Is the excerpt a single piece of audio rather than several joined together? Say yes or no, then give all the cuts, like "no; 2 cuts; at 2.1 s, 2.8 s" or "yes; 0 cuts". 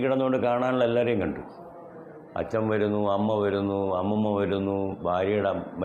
yes; 0 cuts